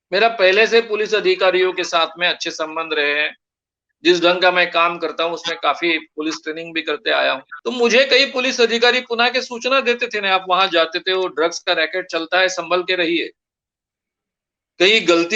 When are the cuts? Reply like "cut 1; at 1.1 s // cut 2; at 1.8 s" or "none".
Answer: cut 1; at 7.5 s